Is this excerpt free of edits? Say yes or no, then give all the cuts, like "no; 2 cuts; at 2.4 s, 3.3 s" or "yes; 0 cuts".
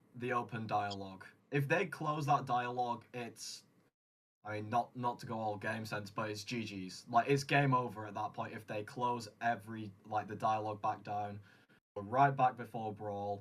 yes; 0 cuts